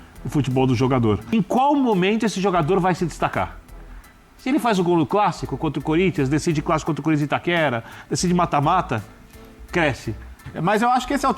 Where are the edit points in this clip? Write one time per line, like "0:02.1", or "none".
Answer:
0:01.3
0:10.4

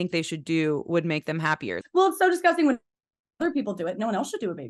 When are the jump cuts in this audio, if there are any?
0:01.7

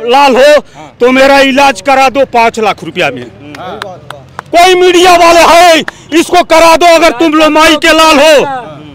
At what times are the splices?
none

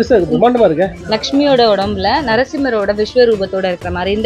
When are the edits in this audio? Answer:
0:00.9

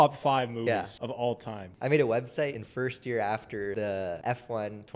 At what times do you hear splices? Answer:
0:01.3
0:02.6
0:04.1

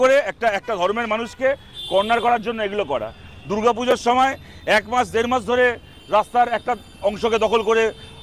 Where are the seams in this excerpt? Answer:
none

